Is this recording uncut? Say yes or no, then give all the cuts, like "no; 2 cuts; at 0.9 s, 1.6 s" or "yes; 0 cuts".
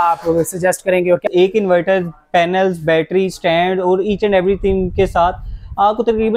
no; 1 cut; at 1.2 s